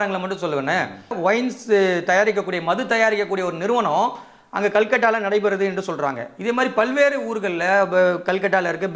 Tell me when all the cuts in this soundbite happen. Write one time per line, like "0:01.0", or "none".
0:01.2